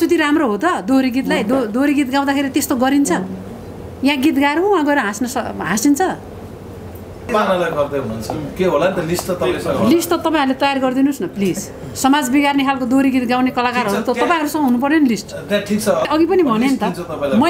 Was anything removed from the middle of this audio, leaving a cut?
yes; 2 cuts; at 7.3 s, 16.1 s

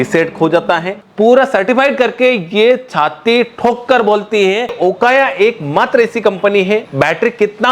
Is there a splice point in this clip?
yes; 3 cuts; at 1.0 s, 4.8 s, 6.9 s

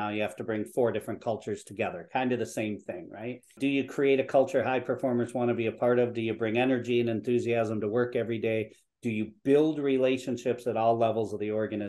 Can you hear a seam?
yes; 1 cut; at 3.5 s

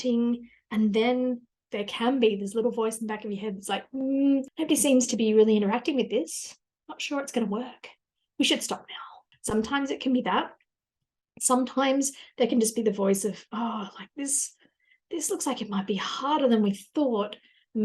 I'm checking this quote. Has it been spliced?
yes; 1 cut; at 1.5 s

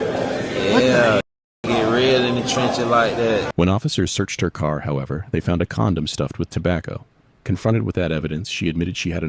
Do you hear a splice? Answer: yes; 1 cut; at 3.5 s

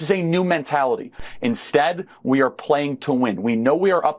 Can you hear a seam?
yes; 1 cut; at 1.2 s

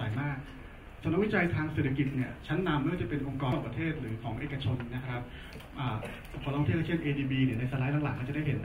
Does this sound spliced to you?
yes; 1 cut; at 3.5 s

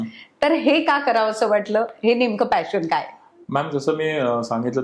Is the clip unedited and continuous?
yes; 0 cuts

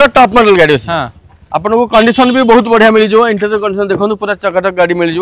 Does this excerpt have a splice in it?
no; 0 cuts

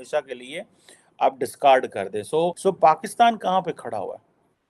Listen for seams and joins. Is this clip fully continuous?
no; 1 cut; at 2.6 s

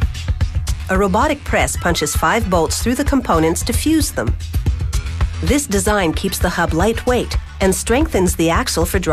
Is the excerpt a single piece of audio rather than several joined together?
no; 1 cut; at 4.1 s

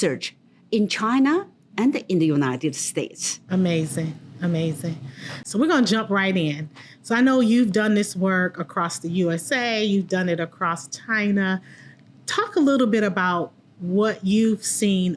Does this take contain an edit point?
no; 0 cuts

